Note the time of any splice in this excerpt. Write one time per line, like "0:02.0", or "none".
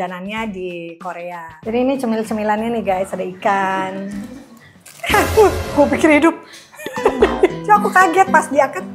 0:01.7
0:07.6

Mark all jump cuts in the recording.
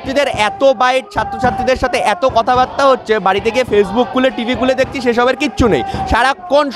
none

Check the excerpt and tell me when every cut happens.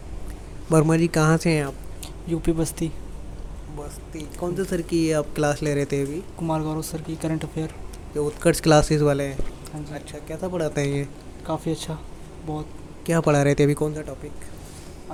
none

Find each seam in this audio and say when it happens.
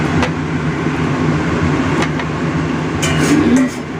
0:03.1

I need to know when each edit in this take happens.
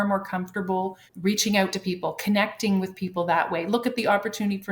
0:01.1

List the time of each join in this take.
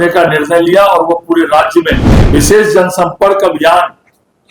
0:02.1

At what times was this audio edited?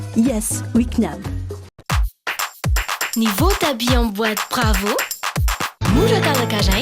0:01.8

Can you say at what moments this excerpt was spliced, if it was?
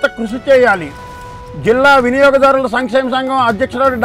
none

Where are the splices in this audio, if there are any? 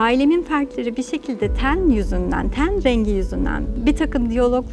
none

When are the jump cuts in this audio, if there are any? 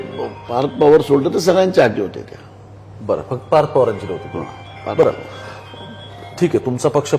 none

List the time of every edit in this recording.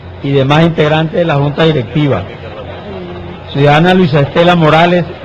0:01.0

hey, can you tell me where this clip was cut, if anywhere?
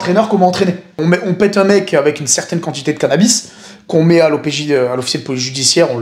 0:01.0

